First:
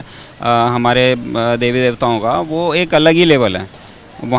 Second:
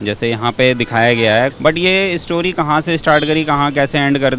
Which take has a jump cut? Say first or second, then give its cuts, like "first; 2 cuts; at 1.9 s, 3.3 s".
second; 1 cut; at 1.5 s